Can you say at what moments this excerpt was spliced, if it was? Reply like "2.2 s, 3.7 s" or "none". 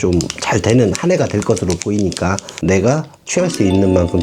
2.5 s